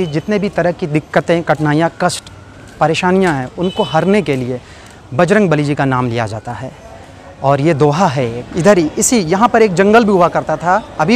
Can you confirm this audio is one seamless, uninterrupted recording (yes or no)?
no